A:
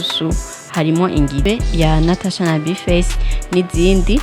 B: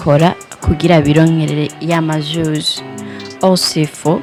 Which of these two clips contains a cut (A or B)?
A